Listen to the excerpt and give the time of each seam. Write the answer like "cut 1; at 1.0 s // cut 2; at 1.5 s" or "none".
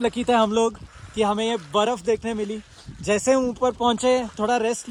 none